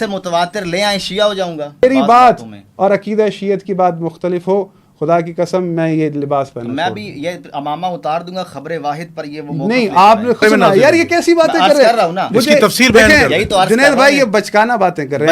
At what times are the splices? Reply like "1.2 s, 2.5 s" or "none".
1.8 s, 10.4 s